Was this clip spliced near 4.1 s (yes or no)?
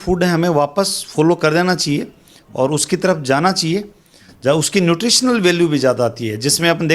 no